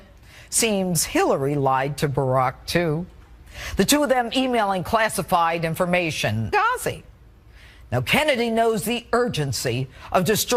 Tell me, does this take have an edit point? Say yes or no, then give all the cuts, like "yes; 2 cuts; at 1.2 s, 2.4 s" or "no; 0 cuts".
no; 0 cuts